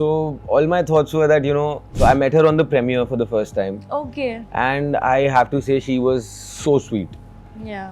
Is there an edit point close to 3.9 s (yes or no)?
no